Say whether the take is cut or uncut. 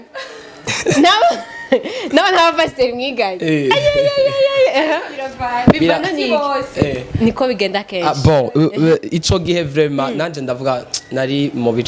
uncut